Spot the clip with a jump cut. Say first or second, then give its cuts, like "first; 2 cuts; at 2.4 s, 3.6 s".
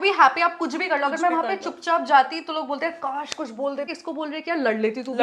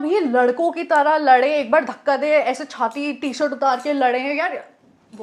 first; 1 cut; at 3.9 s